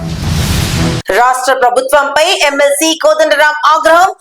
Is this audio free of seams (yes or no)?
no